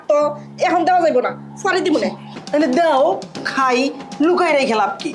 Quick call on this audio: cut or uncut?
cut